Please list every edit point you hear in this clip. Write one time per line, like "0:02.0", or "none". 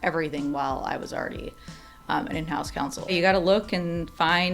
0:03.1